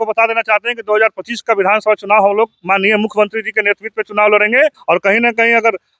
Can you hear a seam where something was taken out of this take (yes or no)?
yes